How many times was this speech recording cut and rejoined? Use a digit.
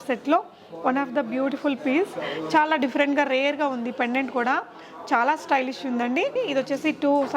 1